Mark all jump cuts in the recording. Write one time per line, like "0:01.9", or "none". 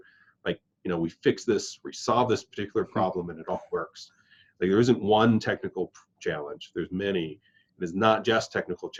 none